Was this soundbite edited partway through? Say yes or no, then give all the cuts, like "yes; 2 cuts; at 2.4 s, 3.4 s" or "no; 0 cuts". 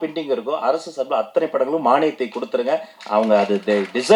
no; 0 cuts